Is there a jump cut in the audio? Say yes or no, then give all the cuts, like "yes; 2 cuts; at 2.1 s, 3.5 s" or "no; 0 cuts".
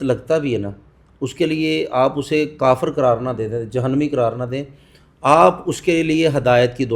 no; 0 cuts